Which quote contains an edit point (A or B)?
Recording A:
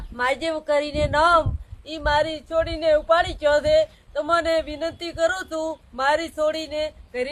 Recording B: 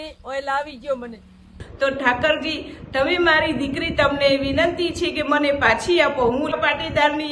B